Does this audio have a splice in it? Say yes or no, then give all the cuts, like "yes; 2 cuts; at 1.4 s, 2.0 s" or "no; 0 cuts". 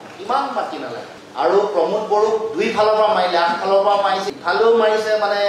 yes; 1 cut; at 1.1 s